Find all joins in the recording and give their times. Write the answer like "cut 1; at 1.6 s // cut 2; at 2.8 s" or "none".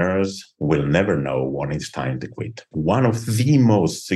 cut 1; at 2.7 s

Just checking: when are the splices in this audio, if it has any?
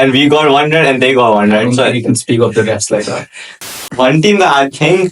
cut 1; at 3.7 s

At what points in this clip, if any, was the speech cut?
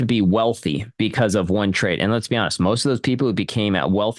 none

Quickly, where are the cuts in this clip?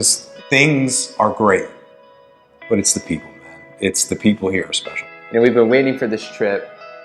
cut 1; at 5.1 s

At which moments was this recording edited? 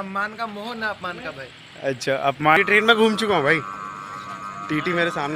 cut 1; at 2.6 s

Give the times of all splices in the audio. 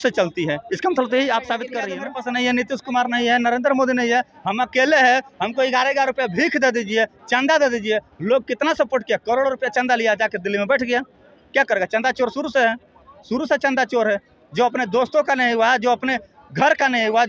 cut 1; at 1.8 s

